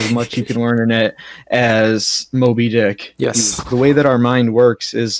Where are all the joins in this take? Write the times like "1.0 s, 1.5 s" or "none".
3.6 s